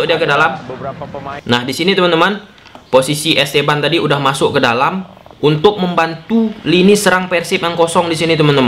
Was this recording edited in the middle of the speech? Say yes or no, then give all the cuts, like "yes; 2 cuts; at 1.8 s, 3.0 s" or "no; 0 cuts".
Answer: yes; 1 cut; at 1.4 s